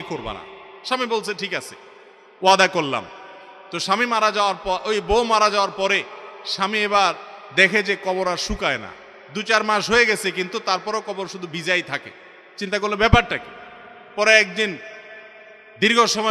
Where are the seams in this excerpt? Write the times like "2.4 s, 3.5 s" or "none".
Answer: none